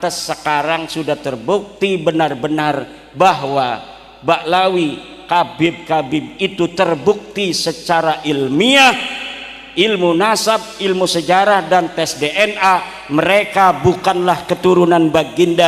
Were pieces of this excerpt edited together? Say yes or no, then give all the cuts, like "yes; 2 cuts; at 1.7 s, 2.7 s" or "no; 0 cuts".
no; 0 cuts